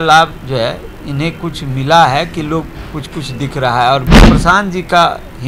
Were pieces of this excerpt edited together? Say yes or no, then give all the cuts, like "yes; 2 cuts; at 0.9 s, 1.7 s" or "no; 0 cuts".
yes; 1 cut; at 4.1 s